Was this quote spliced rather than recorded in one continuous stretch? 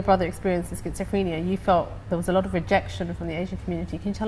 no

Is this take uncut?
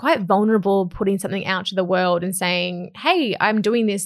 yes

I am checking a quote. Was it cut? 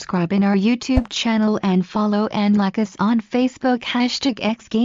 no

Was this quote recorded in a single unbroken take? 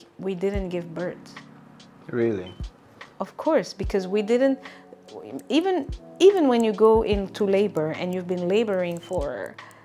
yes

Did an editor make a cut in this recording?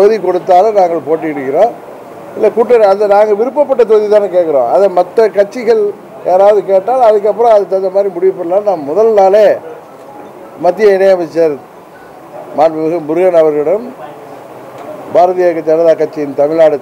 no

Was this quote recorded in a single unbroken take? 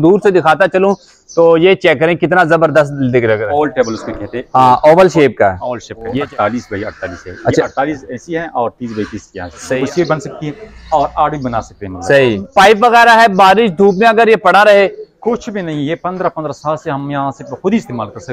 no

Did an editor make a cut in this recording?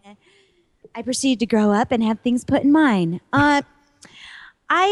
no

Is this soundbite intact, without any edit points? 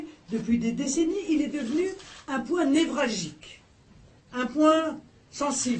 yes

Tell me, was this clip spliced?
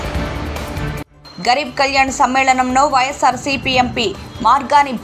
yes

